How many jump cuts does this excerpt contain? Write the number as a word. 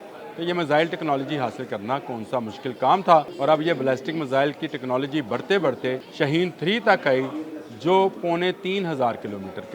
two